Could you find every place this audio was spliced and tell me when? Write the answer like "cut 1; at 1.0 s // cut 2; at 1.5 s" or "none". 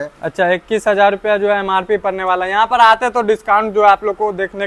none